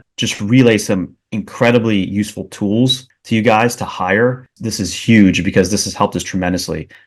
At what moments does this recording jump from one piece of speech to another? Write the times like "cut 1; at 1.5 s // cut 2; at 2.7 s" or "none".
cut 1; at 4.5 s